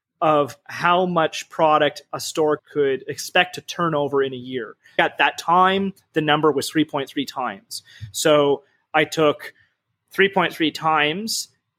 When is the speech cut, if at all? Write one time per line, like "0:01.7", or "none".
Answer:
0:02.6
0:05.0